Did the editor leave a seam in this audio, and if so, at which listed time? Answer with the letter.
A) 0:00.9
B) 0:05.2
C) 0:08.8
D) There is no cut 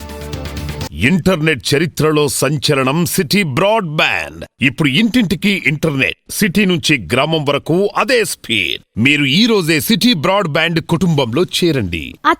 A